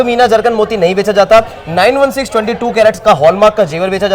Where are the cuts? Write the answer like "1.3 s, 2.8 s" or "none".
none